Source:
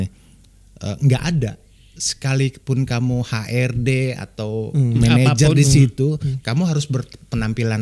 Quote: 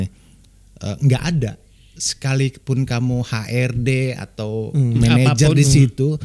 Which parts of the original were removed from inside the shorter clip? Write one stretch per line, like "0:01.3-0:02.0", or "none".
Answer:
none